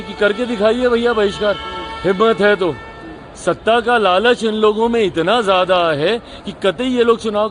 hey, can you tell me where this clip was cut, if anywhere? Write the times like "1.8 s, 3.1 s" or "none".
none